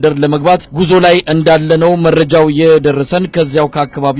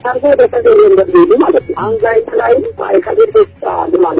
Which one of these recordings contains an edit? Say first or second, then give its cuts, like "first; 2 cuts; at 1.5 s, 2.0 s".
second; 1 cut; at 2.8 s